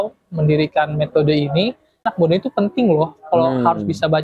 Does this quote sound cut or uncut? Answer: cut